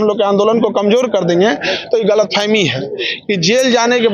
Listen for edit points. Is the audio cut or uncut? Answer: uncut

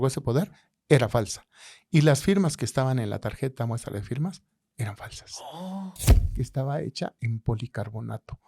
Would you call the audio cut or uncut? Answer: cut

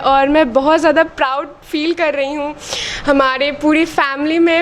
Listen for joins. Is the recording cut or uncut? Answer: uncut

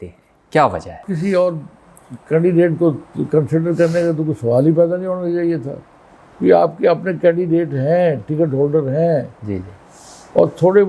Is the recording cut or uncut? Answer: cut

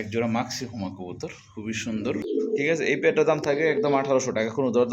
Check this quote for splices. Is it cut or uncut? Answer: cut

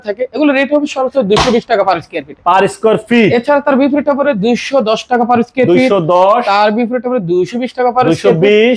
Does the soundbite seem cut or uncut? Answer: uncut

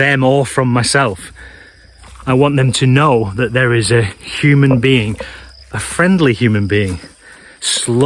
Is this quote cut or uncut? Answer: uncut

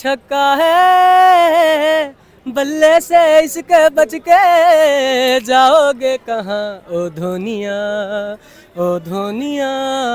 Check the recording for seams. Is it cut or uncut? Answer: uncut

